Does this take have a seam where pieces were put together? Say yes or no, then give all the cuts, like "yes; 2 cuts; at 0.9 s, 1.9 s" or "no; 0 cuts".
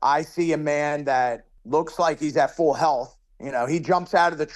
yes; 1 cut; at 1.5 s